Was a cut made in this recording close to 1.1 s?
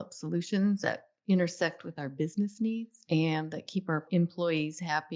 no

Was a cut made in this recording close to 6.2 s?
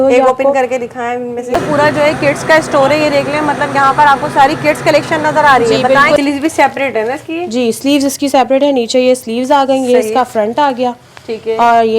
yes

